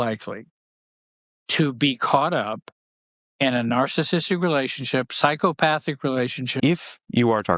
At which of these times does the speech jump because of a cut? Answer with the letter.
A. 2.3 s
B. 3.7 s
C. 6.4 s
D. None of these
C